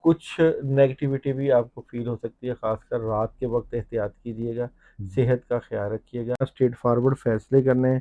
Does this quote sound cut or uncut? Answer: cut